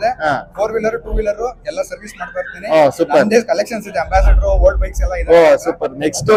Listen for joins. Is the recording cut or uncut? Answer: uncut